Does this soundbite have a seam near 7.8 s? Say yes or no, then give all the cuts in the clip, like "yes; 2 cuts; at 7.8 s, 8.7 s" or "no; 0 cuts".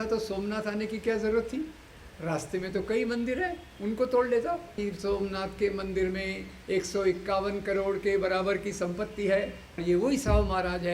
no; 2 cuts; at 4.8 s, 9.7 s